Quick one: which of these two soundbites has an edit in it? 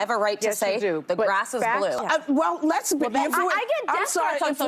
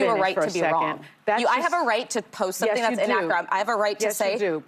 first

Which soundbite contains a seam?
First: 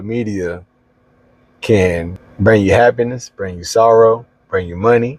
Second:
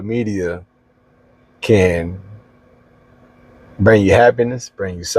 first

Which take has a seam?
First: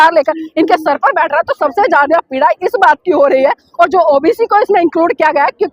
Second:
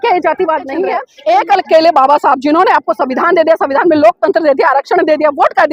second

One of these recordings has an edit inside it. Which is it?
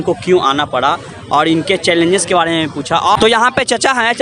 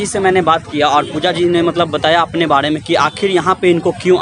first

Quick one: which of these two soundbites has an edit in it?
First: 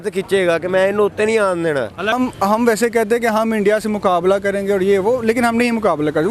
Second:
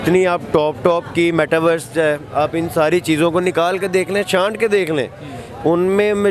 first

